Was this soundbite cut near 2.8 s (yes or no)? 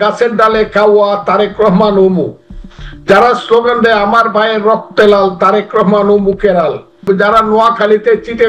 no